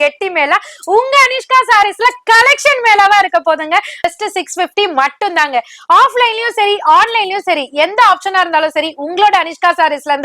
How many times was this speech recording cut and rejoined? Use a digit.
1